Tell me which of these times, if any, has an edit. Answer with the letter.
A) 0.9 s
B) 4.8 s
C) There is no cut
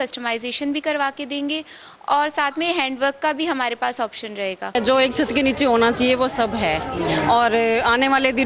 B